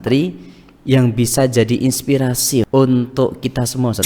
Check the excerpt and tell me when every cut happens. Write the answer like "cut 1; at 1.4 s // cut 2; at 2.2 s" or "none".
cut 1; at 2.7 s

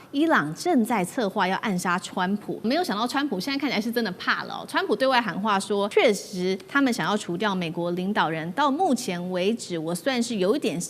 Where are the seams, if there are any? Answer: cut 1; at 2.6 s // cut 2; at 5.9 s

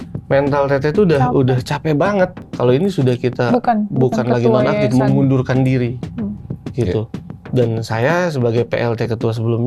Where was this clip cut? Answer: cut 1; at 2.4 s

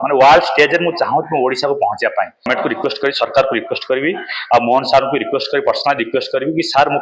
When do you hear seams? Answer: cut 1; at 2.5 s

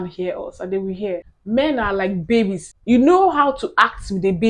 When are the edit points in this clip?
cut 1; at 1.3 s // cut 2; at 2.7 s

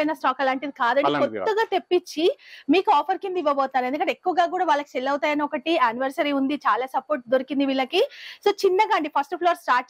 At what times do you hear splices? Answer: none

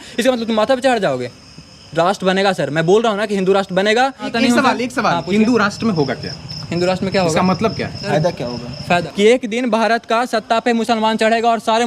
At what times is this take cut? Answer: cut 1; at 4.3 s // cut 2; at 8.0 s // cut 3; at 9.1 s

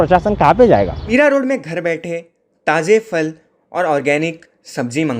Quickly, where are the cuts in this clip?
cut 1; at 1.0 s

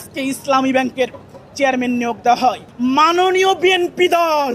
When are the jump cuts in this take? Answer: cut 1; at 2.7 s

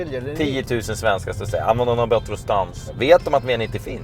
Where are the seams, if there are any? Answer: cut 1; at 2.9 s

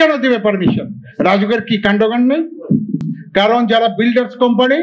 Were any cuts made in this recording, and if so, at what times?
cut 1; at 3.2 s

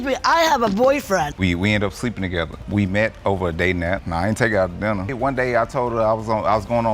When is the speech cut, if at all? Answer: cut 1; at 1.3 s

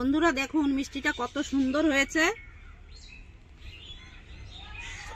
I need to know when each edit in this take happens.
none

